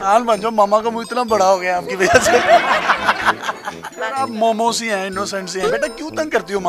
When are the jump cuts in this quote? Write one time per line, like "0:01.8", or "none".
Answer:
0:03.8